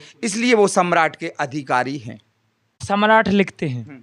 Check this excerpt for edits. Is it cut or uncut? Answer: cut